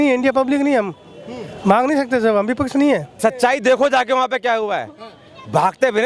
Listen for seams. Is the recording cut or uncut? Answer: cut